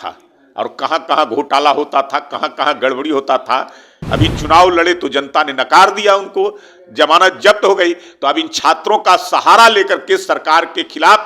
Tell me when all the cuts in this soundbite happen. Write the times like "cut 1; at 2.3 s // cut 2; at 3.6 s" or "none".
cut 1; at 3.9 s